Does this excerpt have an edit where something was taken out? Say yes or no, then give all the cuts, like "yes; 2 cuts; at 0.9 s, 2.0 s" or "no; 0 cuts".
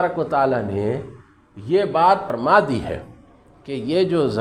yes; 1 cut; at 2.2 s